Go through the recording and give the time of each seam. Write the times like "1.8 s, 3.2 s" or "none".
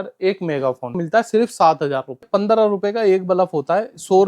1.0 s, 2.3 s